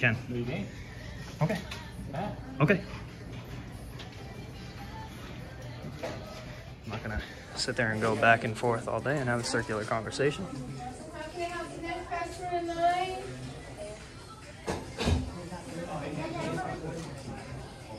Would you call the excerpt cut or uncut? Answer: uncut